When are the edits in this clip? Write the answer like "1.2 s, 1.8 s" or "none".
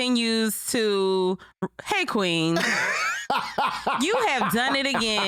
none